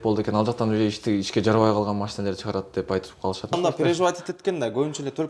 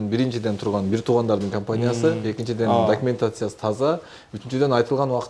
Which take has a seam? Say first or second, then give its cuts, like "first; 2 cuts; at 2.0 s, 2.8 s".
first; 1 cut; at 3.5 s